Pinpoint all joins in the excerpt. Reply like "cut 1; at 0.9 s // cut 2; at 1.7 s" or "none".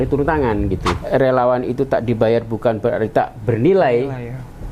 cut 1; at 0.9 s